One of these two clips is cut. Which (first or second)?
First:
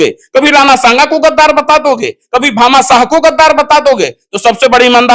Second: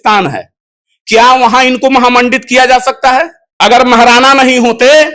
second